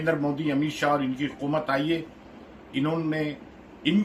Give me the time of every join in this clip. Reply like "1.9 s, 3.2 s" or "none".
none